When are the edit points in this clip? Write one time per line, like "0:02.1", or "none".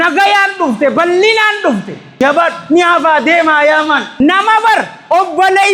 0:02.2
0:04.1

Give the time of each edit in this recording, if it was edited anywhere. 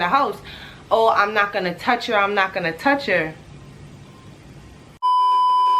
0:04.8

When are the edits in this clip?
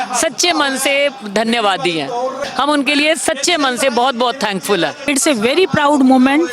0:02.4
0:05.0

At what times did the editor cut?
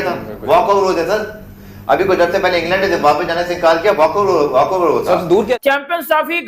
0:05.6

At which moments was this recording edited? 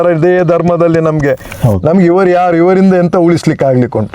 0:01.5

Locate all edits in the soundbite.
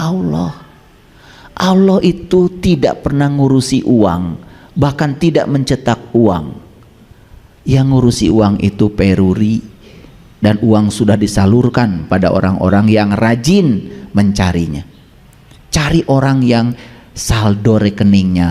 none

